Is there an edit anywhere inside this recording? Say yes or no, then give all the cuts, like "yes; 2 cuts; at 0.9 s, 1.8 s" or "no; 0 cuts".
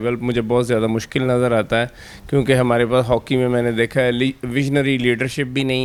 no; 0 cuts